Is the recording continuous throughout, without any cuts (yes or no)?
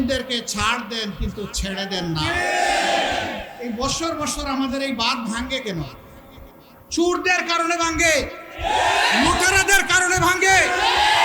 no